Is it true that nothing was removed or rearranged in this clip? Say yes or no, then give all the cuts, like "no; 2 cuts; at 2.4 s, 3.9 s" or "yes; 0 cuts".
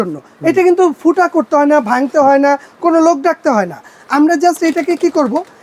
yes; 0 cuts